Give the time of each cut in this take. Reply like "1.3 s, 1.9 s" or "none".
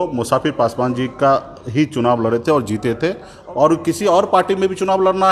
3.3 s